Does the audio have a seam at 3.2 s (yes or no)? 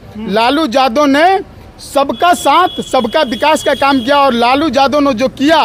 no